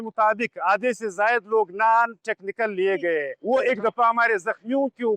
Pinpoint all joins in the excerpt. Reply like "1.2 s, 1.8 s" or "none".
3.3 s